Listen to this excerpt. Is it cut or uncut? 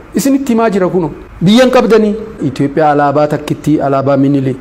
cut